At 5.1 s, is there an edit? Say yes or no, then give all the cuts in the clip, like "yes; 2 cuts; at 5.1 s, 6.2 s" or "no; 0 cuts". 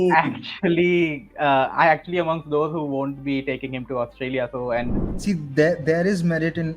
yes; 1 cut; at 5.1 s